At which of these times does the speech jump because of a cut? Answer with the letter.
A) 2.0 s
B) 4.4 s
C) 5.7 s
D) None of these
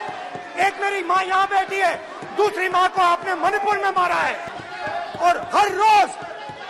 B